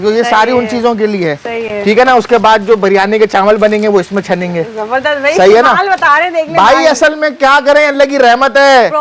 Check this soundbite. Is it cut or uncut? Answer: uncut